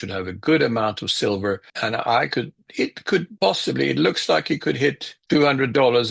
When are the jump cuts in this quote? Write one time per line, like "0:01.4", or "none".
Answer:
0:01.7
0:03.3
0:05.1